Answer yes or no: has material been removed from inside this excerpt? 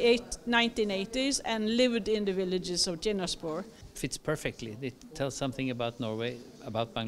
yes